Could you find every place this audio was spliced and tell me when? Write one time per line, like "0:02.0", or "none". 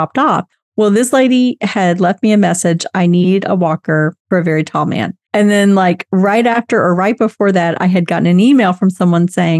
0:04.2
0:05.2